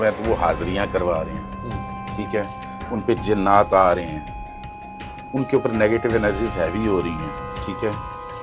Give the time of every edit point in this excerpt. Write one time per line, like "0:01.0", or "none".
none